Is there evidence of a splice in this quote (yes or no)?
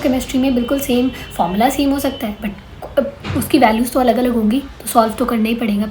no